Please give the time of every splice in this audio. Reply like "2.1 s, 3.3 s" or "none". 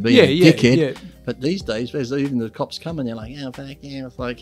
none